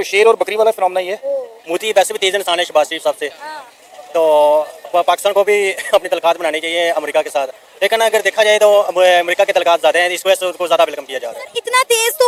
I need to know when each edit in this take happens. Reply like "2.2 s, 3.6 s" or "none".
none